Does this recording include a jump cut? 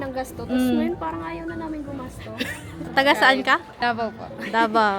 yes; 2 cuts; at 2.9 s, 3.7 s

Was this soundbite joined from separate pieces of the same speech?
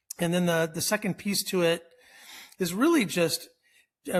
no; 0 cuts

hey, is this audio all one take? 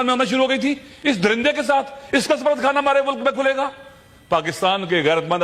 yes; 0 cuts

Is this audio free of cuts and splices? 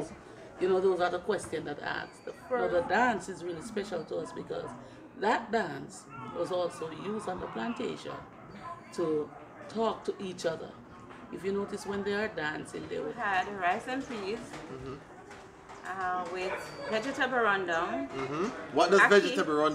no; 2 cuts; at 2.3 s, 13.1 s

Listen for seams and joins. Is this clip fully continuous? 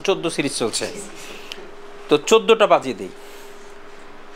yes; 0 cuts

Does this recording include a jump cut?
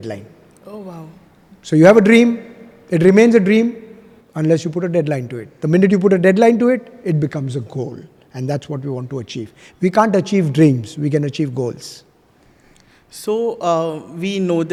no; 0 cuts

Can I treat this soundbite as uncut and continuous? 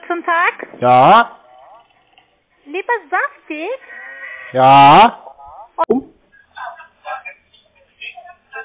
no; 1 cut; at 5.8 s

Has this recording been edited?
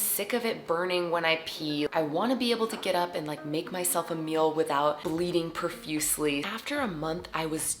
no; 0 cuts

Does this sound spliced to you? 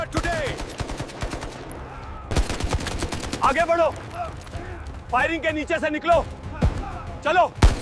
yes; 1 cut; at 2.2 s

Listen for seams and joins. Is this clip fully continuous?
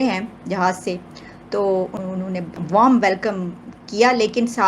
no; 1 cut; at 2.0 s

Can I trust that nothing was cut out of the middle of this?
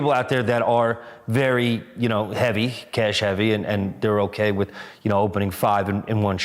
yes; 0 cuts

